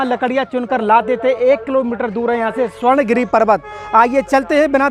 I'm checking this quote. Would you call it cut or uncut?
uncut